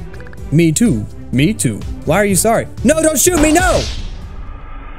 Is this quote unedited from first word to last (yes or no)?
yes